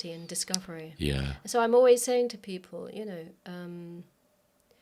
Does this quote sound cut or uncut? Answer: uncut